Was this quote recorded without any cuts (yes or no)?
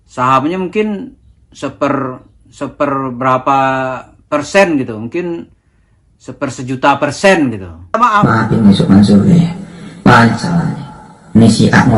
no